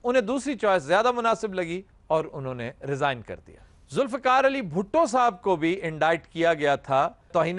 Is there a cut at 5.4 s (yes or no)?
no